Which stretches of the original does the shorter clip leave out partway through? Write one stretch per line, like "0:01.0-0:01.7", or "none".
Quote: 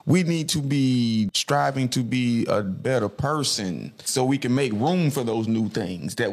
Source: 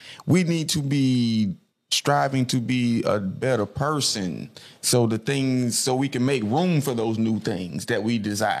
0:01.6-0:01.9
0:04.6-0:05.8